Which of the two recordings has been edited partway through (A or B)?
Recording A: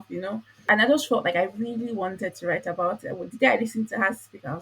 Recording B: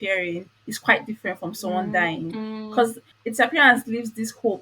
B